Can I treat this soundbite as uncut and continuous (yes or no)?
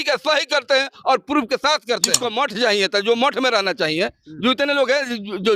no